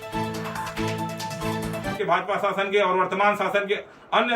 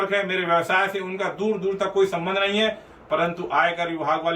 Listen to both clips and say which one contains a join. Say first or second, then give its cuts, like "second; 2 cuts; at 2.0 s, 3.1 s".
first; 1 cut; at 2.0 s